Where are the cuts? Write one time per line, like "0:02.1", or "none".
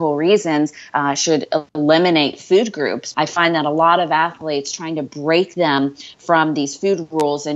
0:03.0

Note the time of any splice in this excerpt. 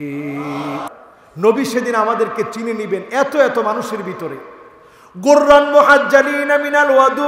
0:00.9

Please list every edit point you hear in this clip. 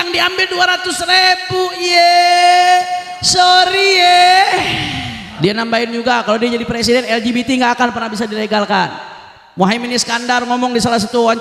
0:05.2

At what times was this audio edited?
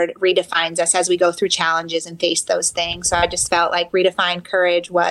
none

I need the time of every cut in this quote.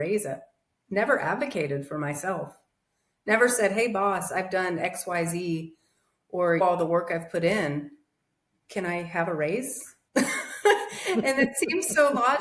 none

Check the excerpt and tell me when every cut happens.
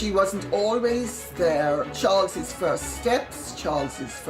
0:01.9

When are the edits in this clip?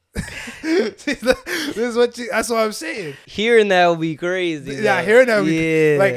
0:03.2

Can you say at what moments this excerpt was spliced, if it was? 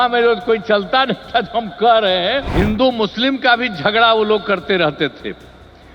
0:02.5

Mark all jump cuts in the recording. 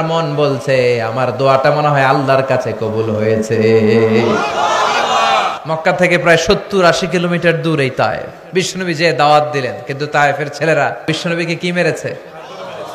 0:05.5
0:08.3
0:11.1

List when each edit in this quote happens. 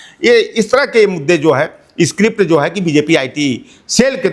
none

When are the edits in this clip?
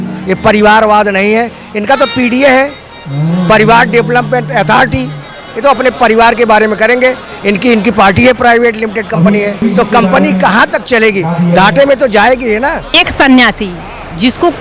0:09.6
0:12.9

